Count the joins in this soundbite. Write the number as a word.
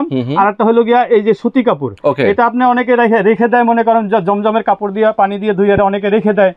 zero